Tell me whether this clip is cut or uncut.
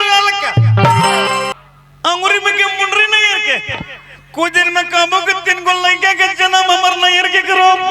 cut